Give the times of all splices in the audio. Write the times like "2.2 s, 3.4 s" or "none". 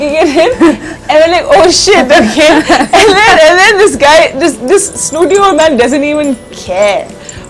none